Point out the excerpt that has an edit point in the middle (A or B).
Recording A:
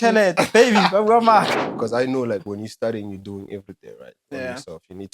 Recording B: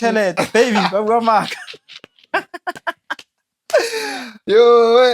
A